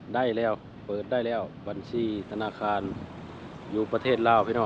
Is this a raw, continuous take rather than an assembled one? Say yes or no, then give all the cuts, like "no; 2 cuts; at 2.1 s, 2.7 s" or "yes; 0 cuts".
yes; 0 cuts